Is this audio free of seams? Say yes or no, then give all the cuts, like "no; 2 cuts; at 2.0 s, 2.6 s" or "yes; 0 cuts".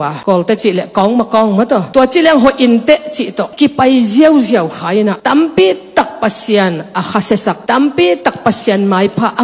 yes; 0 cuts